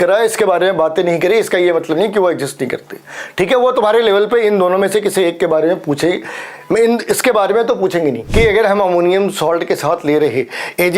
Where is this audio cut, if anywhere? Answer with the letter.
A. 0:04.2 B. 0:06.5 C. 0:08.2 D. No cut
C